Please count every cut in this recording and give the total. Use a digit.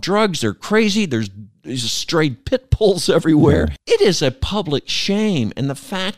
1